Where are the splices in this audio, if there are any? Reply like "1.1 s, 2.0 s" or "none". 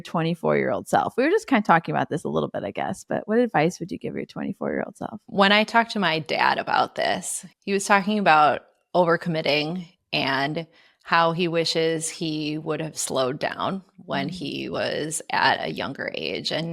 none